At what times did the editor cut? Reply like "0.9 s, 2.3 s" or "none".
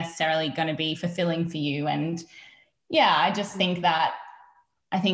none